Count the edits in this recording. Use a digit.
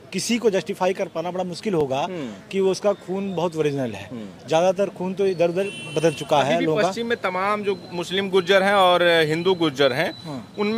0